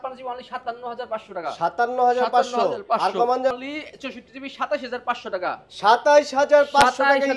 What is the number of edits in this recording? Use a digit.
1